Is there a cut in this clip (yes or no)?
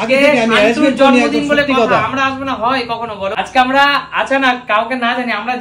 yes